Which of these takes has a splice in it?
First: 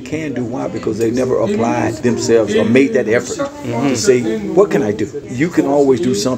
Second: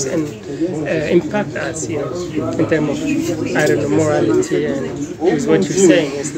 first; 2 cuts; at 2.0 s, 5.2 s

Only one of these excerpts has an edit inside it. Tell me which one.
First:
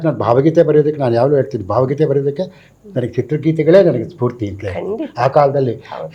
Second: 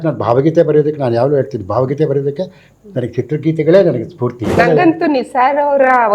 second; 1 cut; at 4.5 s

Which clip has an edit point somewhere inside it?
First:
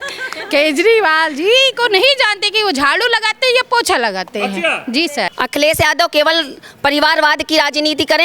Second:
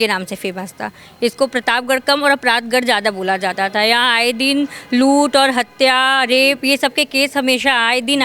first; 1 cut; at 5.3 s

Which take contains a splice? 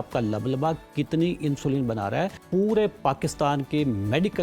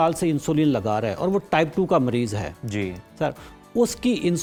first; 1 cut; at 2.4 s

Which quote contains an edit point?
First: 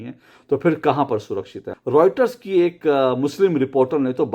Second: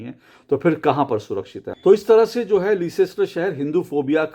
first; 1 cut; at 1.6 s

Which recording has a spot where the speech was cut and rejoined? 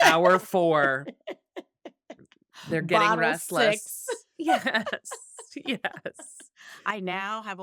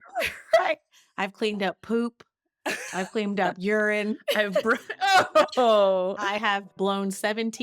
second; 1 cut; at 6.7 s

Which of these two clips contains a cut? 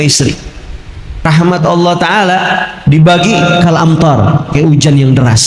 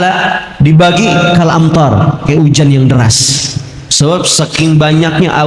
first; 1 cut; at 1.2 s

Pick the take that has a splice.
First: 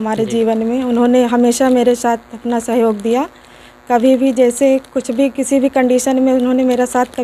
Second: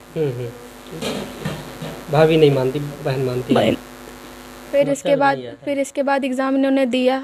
second; 1 cut; at 4.8 s

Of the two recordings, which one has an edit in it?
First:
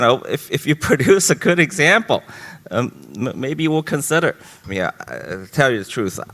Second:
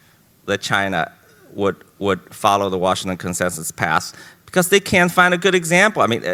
first; 1 cut; at 4.5 s

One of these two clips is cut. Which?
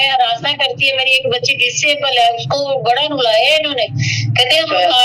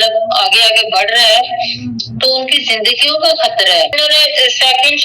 second; 1 cut; at 3.9 s

